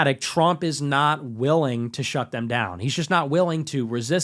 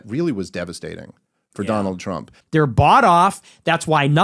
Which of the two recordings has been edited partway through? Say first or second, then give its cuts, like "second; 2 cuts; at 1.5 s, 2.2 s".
second; 1 cut; at 2.4 s